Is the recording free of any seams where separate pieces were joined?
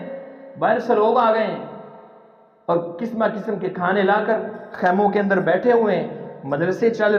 yes; 0 cuts

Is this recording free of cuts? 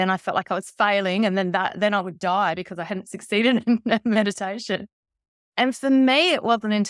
yes; 0 cuts

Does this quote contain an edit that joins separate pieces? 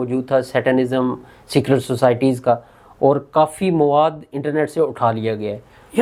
no; 0 cuts

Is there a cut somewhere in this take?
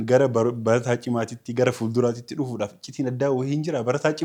no; 0 cuts

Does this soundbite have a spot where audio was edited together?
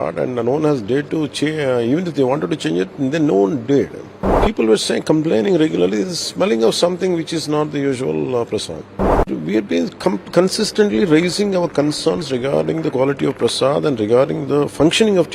yes; 2 cuts; at 4.4 s, 9.3 s

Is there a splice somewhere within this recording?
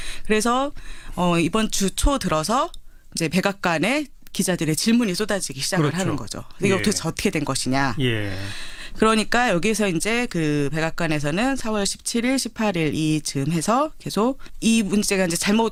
no; 0 cuts

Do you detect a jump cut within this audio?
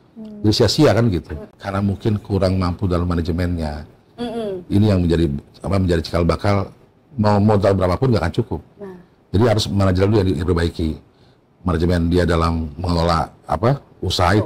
yes; 1 cut; at 1.4 s

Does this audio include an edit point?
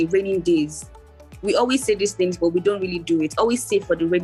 no; 0 cuts

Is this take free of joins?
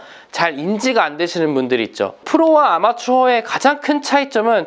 no; 1 cut; at 2.2 s

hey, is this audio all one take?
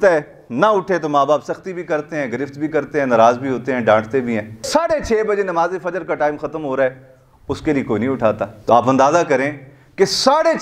yes; 0 cuts

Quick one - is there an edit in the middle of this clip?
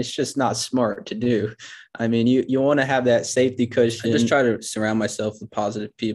yes; 1 cut; at 4.3 s

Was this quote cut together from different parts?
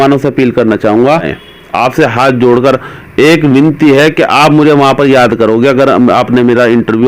yes; 1 cut; at 1.4 s

